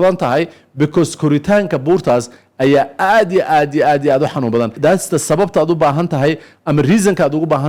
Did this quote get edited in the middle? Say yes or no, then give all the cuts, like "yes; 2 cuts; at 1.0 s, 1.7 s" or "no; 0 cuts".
yes; 1 cut; at 4.8 s